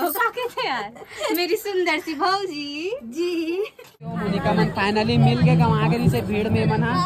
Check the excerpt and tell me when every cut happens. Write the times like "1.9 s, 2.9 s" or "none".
4.2 s